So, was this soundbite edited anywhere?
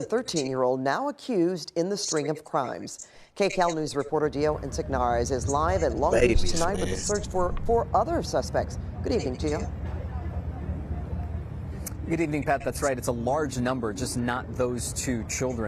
yes; 2 cuts; at 1.9 s, 3.5 s

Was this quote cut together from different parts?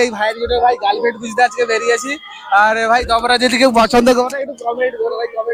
no; 0 cuts

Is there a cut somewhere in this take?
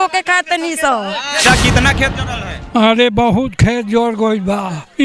yes; 1 cut; at 1.4 s

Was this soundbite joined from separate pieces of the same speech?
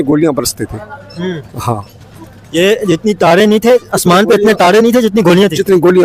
no; 0 cuts

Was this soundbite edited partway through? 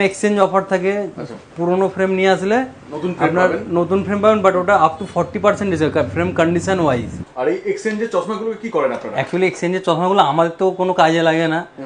no; 0 cuts

